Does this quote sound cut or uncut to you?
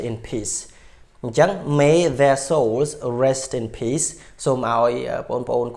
uncut